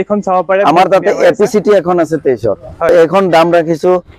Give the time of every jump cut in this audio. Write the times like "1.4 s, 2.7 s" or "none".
2.9 s